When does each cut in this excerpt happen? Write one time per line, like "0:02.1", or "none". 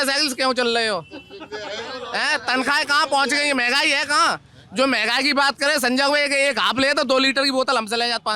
none